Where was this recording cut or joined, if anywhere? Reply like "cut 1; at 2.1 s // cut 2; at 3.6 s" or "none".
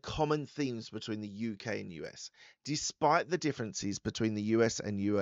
none